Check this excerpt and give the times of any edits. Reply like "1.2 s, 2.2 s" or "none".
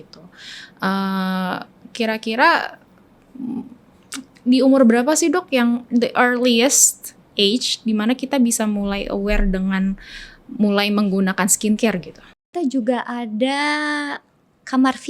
12.4 s